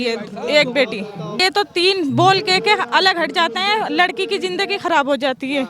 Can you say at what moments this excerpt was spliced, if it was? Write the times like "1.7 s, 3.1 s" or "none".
1.4 s